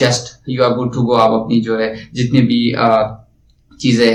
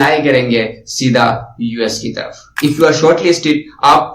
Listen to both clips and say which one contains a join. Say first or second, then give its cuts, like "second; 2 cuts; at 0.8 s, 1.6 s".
second; 1 cut; at 2.5 s